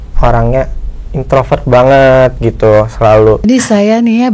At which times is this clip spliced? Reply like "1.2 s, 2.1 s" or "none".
3.4 s